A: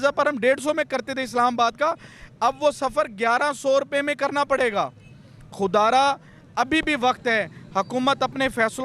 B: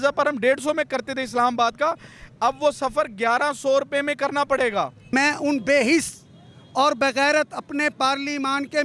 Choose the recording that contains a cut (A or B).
B